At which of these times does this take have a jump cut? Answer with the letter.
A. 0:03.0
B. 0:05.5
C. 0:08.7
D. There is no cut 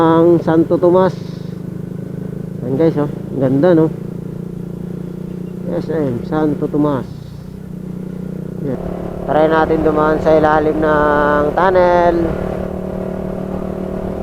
C